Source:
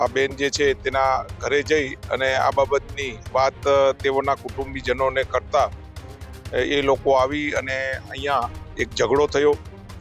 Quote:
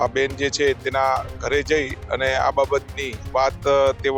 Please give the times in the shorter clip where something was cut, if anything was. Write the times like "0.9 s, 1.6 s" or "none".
none